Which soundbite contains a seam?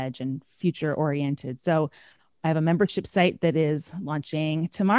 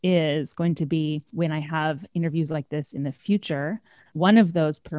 second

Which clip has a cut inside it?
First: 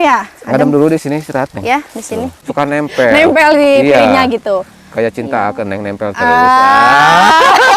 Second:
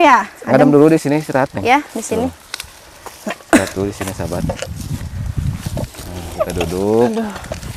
first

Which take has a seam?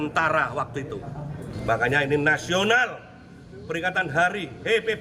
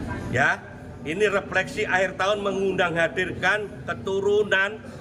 first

